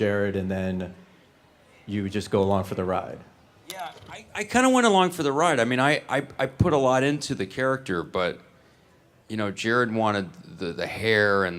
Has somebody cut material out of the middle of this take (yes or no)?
yes